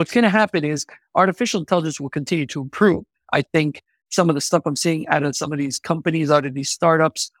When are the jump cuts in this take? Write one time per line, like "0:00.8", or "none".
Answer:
none